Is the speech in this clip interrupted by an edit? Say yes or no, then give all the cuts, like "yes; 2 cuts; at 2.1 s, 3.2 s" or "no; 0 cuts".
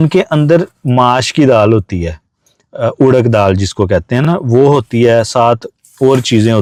no; 0 cuts